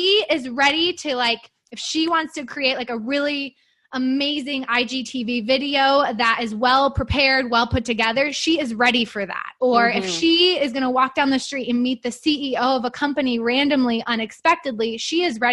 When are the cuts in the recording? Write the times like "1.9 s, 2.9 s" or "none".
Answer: none